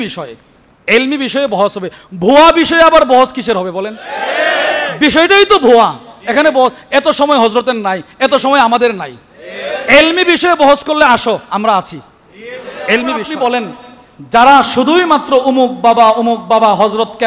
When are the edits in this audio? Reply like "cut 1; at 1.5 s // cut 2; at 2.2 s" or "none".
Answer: cut 1; at 13.3 s